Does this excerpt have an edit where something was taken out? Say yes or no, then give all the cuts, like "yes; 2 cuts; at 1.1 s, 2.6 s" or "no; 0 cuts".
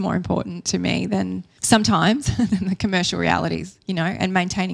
no; 0 cuts